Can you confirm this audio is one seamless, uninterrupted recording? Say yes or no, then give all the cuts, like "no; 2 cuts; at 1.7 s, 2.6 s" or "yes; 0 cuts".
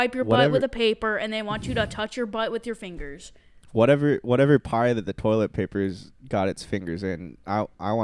yes; 0 cuts